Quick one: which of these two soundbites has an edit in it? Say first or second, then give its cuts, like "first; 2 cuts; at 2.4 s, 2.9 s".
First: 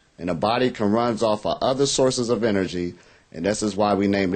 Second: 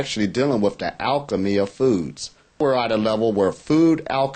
second; 1 cut; at 2.6 s